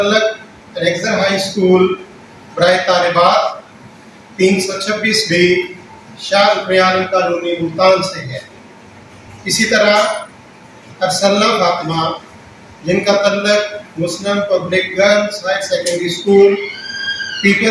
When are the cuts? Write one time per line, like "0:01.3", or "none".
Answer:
none